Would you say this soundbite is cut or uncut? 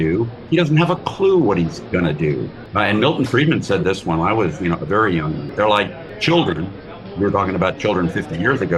cut